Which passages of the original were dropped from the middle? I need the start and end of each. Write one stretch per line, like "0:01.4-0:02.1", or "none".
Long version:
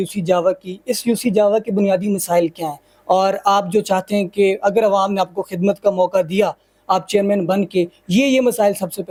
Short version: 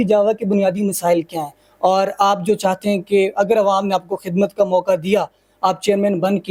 none